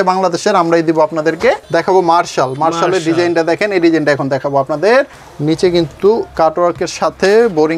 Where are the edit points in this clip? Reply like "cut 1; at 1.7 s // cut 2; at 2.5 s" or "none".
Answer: cut 1; at 1.6 s // cut 2; at 5.2 s